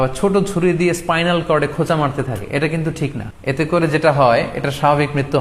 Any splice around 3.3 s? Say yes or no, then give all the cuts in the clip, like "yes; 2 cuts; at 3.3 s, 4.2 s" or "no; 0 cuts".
yes; 1 cut; at 3.3 s